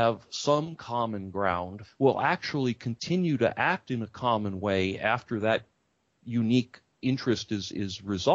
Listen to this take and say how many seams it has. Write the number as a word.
one